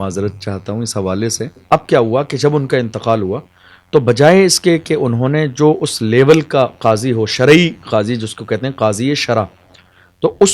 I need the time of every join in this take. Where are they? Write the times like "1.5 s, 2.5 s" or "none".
1.6 s